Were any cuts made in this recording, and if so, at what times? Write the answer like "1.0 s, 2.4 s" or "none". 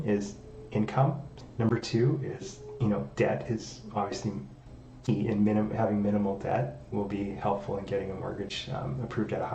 1.3 s

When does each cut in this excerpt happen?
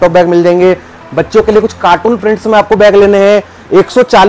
none

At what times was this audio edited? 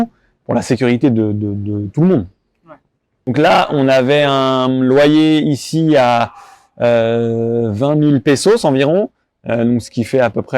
3.3 s

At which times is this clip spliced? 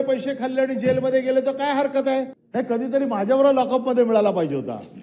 2.4 s

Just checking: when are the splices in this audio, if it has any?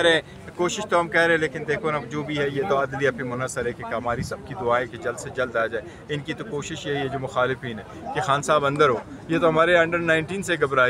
none

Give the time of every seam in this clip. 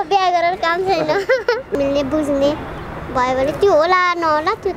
1.7 s

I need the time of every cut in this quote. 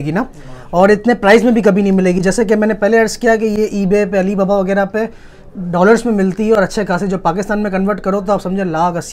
none

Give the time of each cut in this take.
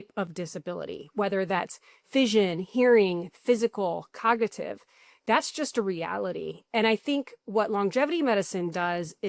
none

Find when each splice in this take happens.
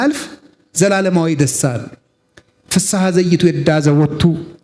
none

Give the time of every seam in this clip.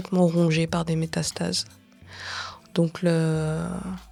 none

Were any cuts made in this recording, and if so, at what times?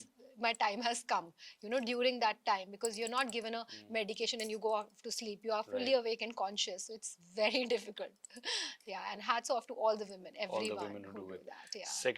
none

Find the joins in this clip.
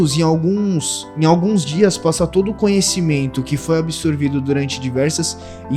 none

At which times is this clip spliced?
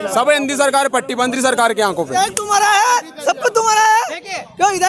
2.1 s

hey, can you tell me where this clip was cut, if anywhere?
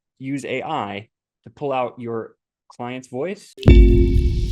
3.6 s

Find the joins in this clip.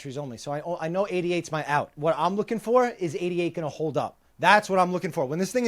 1.9 s

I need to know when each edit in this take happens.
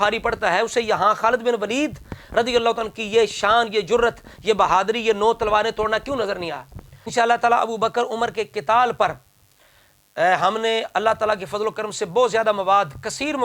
7.1 s

